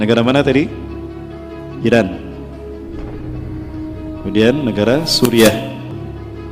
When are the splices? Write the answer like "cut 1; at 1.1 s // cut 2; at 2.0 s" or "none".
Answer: none